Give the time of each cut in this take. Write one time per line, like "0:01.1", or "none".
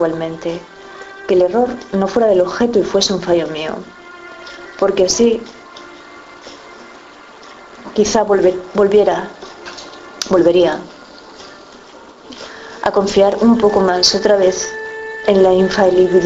0:13.9